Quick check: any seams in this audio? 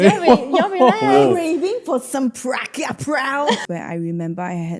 yes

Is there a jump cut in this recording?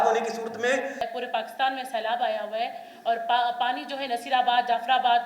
yes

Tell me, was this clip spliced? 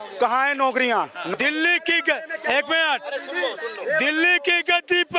yes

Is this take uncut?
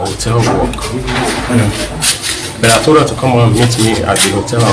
yes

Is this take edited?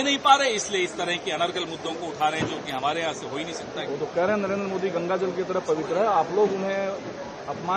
no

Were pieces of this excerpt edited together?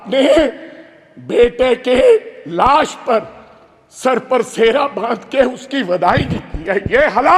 no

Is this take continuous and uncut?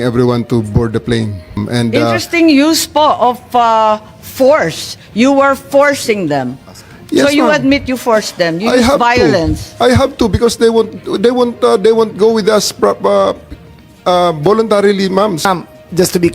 no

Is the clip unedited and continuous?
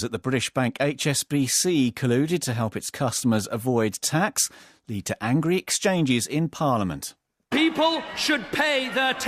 yes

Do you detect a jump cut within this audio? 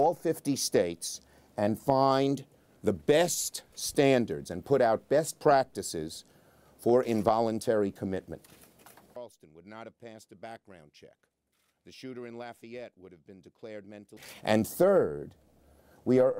no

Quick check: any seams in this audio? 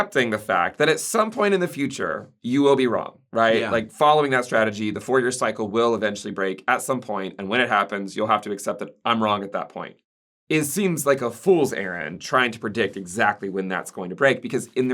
no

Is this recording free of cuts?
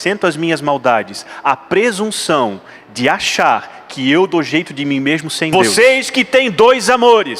no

